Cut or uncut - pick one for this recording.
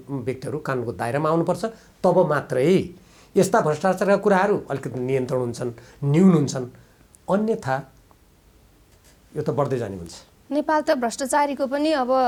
uncut